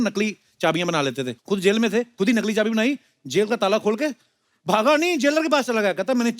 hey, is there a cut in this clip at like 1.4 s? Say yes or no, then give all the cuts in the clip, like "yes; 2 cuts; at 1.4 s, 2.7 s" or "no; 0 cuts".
yes; 2 cuts; at 1.4 s, 2.1 s